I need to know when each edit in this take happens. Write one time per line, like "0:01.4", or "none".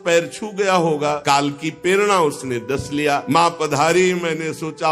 0:01.2
0:03.2